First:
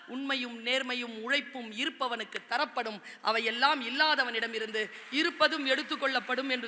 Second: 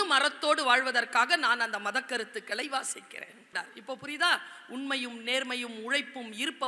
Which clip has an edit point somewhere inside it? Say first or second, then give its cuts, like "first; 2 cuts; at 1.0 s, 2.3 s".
second; 1 cut; at 3.5 s